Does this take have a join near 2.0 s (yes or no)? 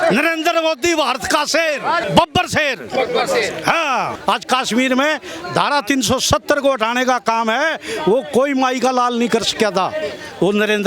yes